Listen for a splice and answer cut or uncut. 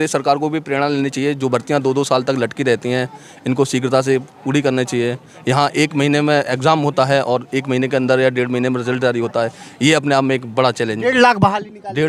uncut